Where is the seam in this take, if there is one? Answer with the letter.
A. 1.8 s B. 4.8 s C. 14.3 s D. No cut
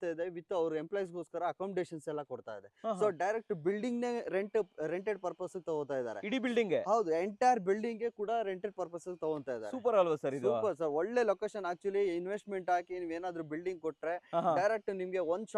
D